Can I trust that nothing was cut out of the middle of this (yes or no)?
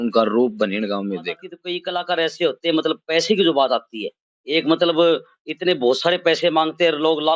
no